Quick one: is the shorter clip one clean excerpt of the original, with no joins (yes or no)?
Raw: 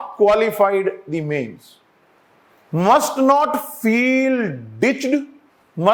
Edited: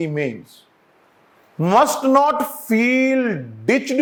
yes